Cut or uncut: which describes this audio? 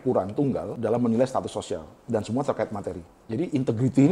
cut